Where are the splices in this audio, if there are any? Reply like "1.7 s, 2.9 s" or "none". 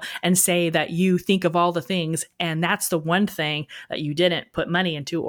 none